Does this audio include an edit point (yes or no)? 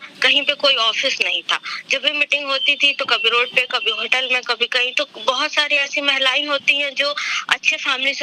no